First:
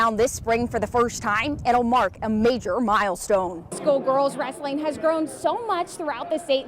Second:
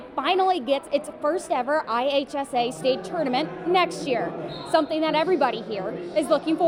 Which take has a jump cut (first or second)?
first